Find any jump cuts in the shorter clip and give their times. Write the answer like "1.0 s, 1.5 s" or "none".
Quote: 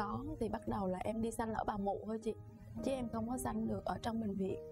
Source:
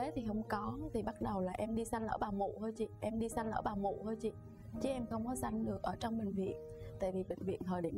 2.4 s

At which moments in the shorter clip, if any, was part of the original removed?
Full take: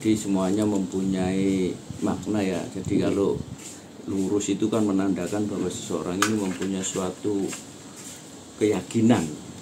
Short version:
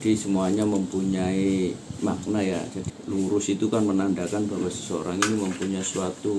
2.8 s

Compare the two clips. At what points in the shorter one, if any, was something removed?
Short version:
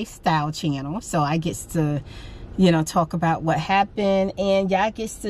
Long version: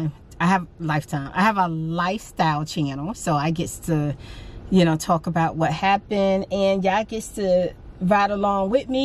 none

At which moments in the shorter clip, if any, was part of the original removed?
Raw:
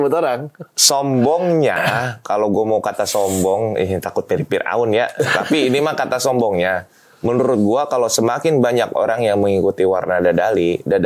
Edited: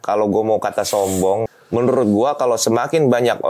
1.5 s

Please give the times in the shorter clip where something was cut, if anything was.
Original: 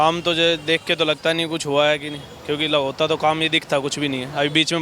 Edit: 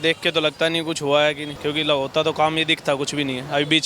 1.5 s

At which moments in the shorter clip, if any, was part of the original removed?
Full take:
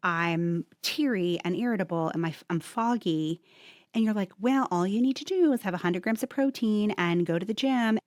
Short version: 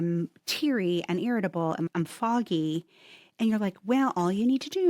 1.9 s

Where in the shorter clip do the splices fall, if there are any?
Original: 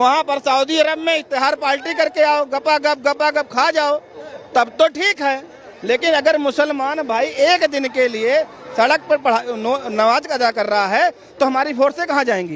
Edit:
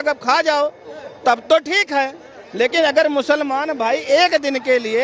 none

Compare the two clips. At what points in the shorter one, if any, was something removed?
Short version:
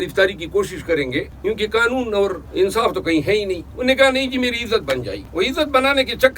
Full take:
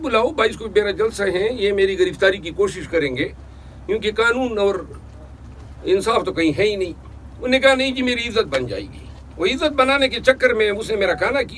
1.3 s, 2.4 s, 3.7 s, 5.2 s

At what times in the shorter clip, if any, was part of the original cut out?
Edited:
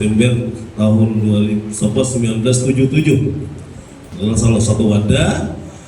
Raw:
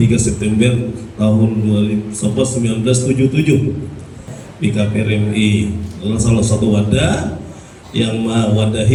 4.0 s

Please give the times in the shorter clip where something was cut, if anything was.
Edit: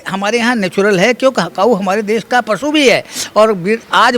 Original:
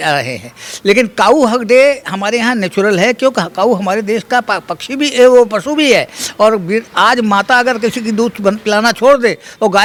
2.5 s

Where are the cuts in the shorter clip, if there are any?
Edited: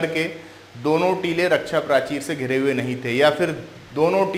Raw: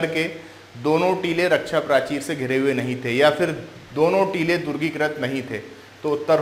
none

